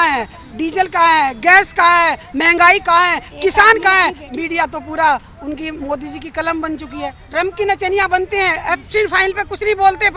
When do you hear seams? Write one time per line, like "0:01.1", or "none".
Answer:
0:04.2
0:07.2